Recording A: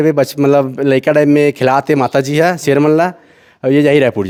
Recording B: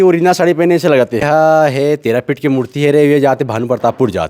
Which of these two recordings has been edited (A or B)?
B